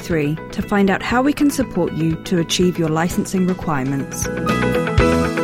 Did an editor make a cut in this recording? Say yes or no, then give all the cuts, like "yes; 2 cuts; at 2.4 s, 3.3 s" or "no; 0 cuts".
yes; 1 cut; at 4.2 s